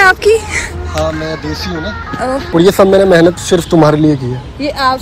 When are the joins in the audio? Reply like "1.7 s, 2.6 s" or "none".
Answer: 2.4 s